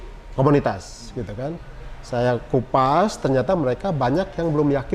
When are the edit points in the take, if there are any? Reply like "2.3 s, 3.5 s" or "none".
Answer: none